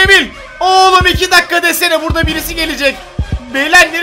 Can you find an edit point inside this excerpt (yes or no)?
no